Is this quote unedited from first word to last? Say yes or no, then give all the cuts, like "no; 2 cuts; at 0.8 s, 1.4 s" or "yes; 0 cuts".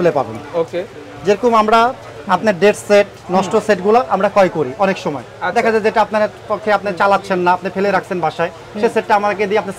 yes; 0 cuts